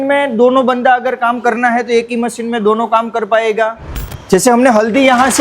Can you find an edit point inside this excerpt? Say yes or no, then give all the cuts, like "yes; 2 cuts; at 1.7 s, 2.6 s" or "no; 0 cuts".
yes; 1 cut; at 4.1 s